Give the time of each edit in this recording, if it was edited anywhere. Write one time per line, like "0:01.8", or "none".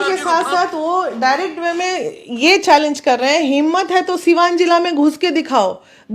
none